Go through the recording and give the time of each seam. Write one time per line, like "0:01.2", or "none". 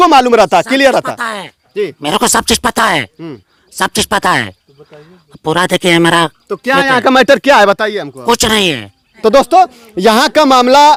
none